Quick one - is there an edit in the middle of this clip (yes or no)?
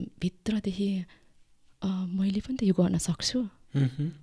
no